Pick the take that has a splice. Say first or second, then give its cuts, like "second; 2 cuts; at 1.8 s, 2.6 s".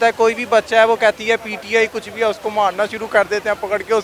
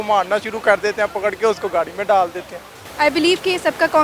second; 1 cut; at 2.8 s